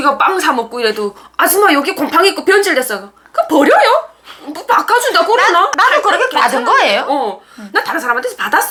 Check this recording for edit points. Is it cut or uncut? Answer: uncut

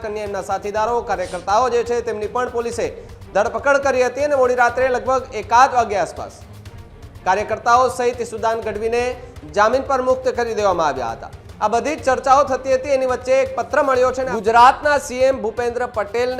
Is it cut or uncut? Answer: cut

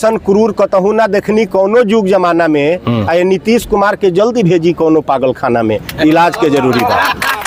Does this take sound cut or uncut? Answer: uncut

